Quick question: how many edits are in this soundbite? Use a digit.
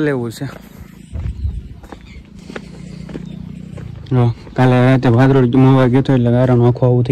0